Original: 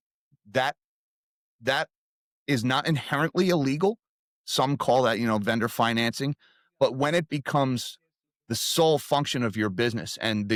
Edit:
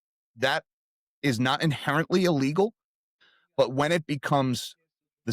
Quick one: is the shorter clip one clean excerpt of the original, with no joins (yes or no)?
no